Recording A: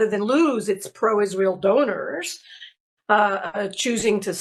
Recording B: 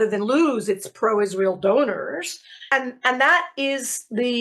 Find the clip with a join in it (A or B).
B